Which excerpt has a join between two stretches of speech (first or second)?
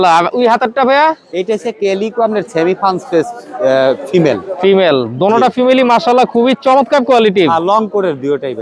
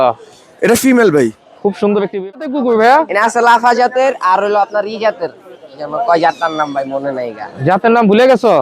second